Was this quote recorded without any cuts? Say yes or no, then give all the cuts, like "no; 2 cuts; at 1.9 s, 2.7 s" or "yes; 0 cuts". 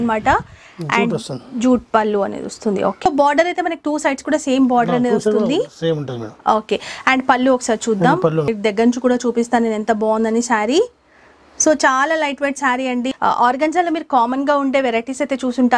no; 3 cuts; at 3.1 s, 8.5 s, 13.1 s